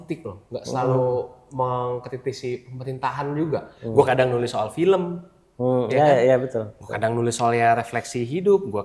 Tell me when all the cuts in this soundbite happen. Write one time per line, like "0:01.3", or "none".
none